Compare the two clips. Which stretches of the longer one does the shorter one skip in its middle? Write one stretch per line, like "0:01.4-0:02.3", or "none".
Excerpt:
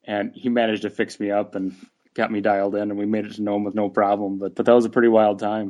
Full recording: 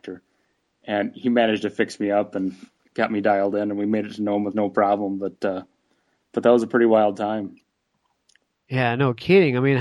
0:05.3-0:06.3